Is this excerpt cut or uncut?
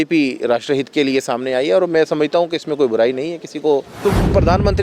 cut